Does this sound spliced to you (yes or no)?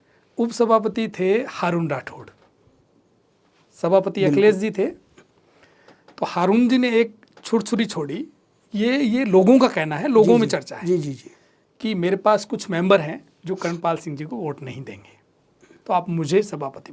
no